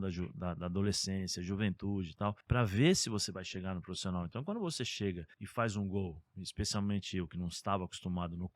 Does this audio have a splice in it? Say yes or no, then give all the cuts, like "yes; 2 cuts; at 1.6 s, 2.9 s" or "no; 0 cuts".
yes; 2 cuts; at 2.4 s, 5.3 s